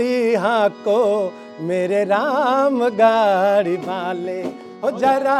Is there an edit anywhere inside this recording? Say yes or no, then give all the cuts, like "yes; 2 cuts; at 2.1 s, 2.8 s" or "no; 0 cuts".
no; 0 cuts